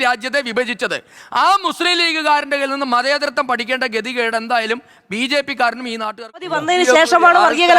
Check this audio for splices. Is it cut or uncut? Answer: cut